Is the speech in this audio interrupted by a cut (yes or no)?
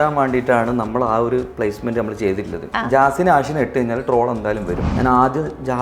yes